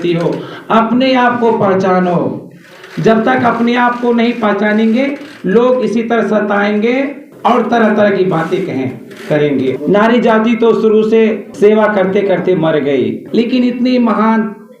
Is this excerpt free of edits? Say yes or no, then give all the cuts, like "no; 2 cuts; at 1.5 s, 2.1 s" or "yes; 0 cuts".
no; 4 cuts; at 7.2 s, 9.8 s, 11.5 s, 13.2 s